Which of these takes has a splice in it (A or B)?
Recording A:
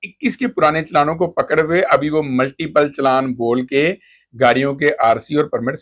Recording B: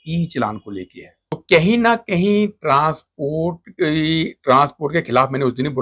B